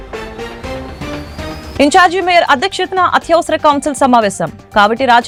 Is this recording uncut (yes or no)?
yes